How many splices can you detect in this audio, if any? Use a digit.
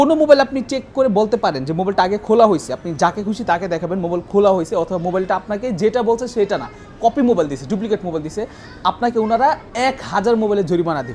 0